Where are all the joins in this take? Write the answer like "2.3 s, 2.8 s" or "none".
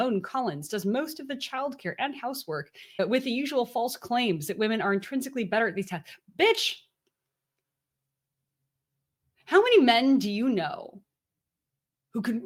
none